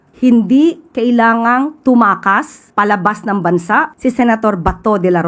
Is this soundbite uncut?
no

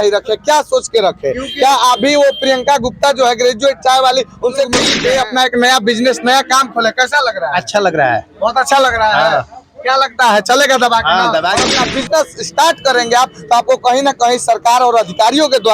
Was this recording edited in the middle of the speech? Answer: yes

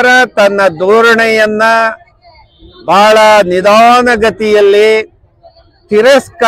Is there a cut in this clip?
no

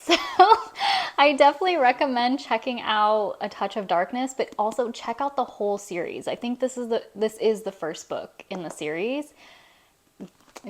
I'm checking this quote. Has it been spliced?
no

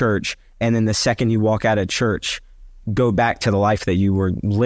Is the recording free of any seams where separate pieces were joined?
yes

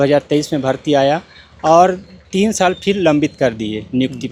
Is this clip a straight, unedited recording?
yes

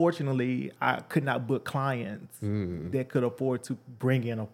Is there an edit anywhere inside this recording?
no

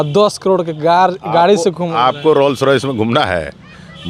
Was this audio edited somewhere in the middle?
no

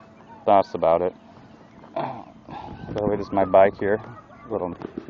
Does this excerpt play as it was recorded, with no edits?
yes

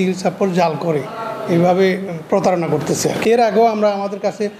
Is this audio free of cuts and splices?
no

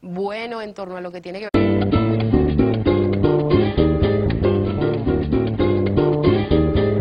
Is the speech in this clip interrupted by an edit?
no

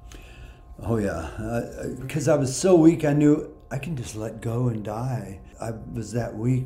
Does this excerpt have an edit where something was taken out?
yes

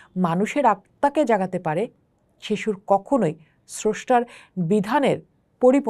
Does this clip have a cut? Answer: no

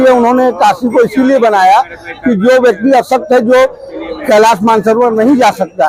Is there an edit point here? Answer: no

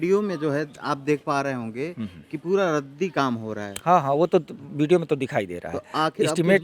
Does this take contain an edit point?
no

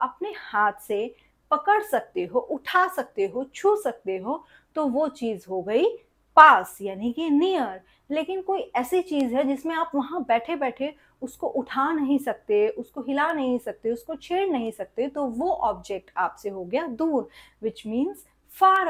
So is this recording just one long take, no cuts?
yes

